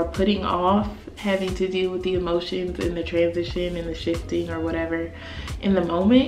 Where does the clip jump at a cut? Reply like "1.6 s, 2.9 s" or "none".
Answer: none